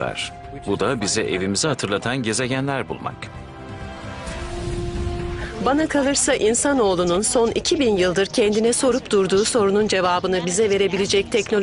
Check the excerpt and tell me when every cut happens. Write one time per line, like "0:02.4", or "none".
none